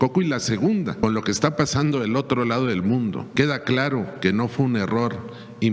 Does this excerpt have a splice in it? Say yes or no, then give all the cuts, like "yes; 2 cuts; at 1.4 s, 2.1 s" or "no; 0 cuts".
yes; 2 cuts; at 1.0 s, 3.2 s